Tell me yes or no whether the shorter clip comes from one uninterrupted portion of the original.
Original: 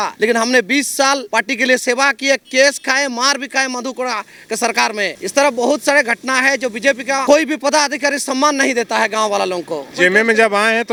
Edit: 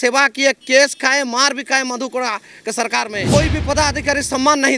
no